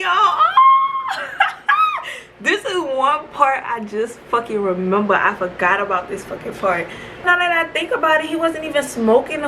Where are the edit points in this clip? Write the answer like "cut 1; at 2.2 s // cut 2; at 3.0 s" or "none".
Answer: cut 1; at 7.2 s